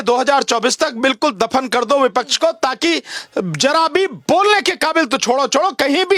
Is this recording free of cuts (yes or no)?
yes